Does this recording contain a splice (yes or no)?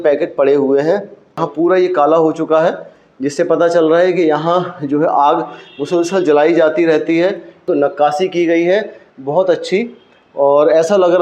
yes